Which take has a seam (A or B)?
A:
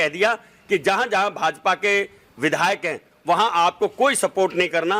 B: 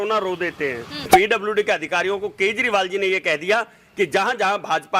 B